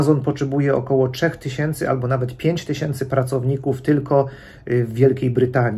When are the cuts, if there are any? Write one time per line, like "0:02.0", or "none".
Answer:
none